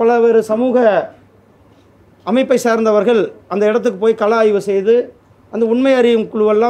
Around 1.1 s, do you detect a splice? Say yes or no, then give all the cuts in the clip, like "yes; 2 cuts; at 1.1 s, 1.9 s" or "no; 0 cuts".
no; 0 cuts